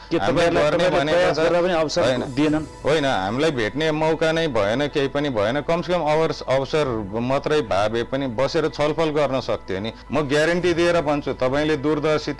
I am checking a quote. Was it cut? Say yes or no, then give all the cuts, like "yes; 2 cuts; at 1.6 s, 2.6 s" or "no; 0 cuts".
yes; 1 cut; at 10.0 s